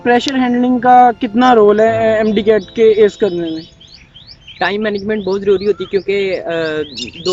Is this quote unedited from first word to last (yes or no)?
yes